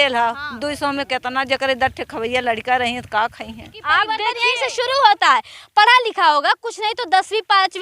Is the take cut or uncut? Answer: cut